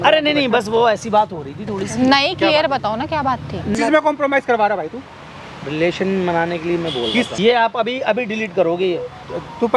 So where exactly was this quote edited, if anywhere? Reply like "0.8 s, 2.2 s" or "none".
3.7 s, 7.3 s